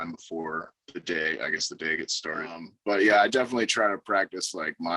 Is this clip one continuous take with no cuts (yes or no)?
no